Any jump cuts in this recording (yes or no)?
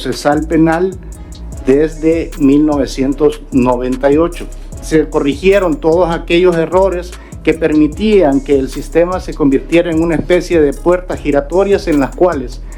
yes